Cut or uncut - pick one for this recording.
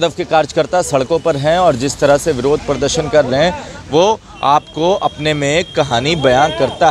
uncut